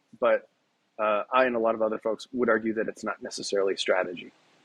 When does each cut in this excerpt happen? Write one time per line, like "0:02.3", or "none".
none